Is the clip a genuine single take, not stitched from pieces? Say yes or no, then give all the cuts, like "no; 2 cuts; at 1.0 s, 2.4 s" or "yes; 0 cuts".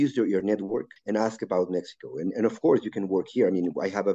no; 1 cut; at 0.9 s